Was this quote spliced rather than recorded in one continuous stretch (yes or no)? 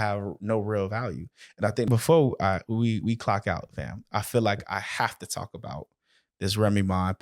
yes